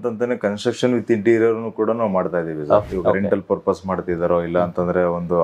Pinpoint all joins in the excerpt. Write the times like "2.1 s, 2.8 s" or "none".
2.9 s